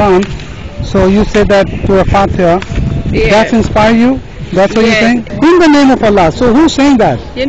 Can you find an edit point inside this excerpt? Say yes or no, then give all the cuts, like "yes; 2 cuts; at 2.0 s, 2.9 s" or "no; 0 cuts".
yes; 2 cuts; at 1.8 s, 5.3 s